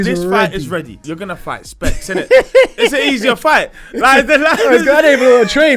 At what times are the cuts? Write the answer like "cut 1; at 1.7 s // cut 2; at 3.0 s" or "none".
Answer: cut 1; at 1.0 s